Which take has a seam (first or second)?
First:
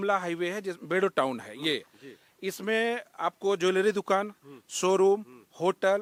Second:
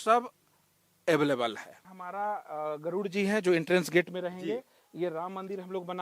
second